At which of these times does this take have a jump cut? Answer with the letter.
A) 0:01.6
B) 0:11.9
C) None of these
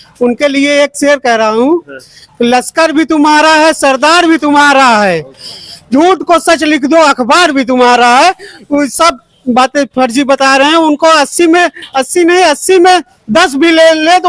C